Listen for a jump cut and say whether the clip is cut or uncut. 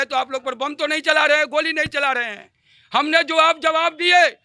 uncut